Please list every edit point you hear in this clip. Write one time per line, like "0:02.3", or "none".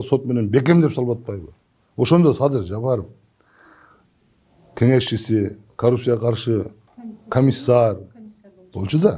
none